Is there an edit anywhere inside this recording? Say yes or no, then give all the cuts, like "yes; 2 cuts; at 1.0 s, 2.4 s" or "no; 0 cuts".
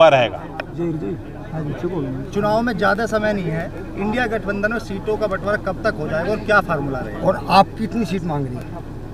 no; 0 cuts